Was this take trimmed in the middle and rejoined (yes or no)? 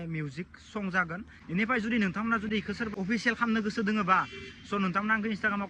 yes